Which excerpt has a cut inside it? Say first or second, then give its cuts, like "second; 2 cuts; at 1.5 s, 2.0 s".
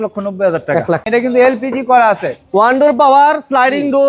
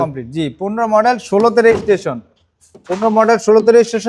first; 1 cut; at 1.0 s